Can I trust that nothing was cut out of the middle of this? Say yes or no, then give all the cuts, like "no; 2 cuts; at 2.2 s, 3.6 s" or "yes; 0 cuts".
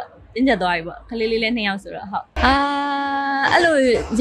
yes; 0 cuts